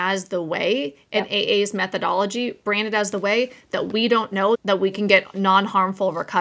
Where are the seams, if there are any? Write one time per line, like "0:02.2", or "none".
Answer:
0:04.6